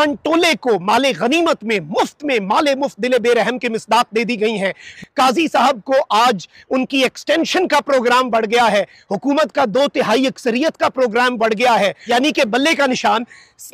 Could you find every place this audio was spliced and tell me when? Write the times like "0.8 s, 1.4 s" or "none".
4.9 s, 12.0 s